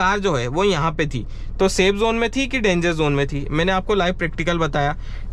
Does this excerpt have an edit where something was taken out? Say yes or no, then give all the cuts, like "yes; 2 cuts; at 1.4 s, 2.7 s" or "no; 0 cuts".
no; 0 cuts